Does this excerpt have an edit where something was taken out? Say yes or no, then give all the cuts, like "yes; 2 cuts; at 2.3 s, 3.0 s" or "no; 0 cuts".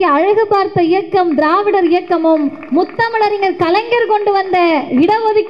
no; 0 cuts